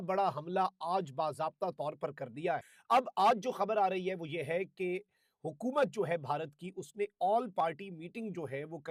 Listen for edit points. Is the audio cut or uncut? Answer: uncut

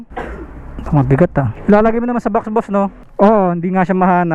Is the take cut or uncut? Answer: cut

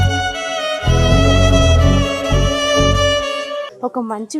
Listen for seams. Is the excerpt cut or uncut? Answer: uncut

